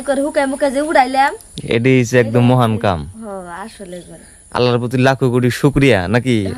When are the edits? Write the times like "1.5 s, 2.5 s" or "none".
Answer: none